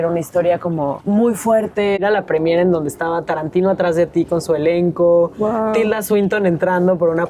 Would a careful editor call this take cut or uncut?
cut